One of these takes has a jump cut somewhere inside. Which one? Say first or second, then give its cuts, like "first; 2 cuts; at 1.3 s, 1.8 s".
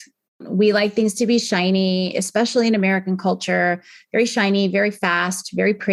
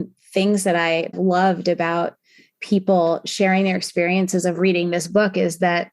second; 1 cut; at 1.1 s